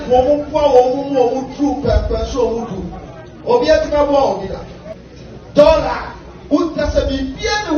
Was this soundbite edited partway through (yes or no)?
yes